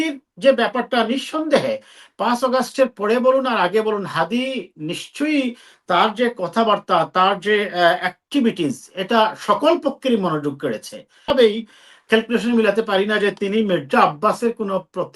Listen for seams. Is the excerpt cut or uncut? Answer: cut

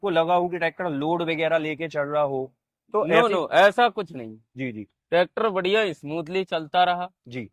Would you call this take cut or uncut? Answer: uncut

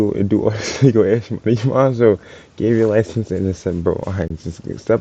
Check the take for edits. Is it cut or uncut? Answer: uncut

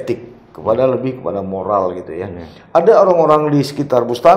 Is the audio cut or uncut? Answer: uncut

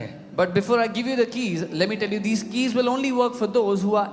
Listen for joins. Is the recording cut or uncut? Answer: uncut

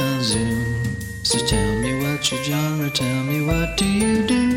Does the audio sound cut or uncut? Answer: uncut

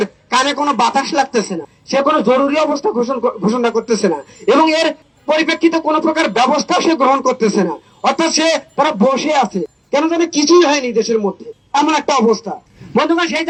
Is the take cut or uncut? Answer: uncut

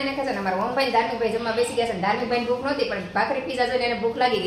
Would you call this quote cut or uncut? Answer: uncut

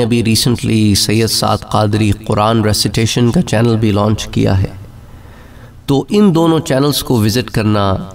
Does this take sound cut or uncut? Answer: uncut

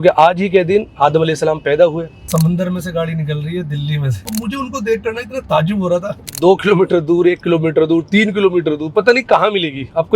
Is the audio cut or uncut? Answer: cut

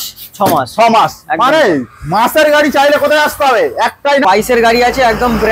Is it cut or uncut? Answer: cut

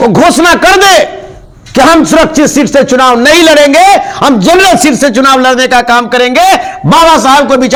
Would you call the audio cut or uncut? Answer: uncut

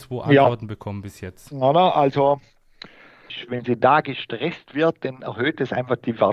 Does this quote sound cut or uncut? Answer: cut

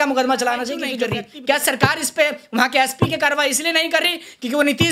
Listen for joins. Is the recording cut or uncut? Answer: cut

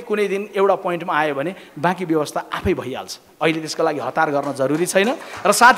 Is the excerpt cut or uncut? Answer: uncut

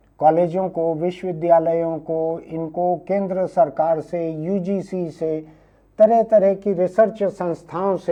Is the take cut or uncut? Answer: uncut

